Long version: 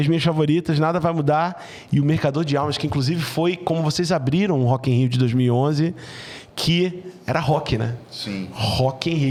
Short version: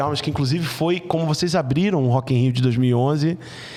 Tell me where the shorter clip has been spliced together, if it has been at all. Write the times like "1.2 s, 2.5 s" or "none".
none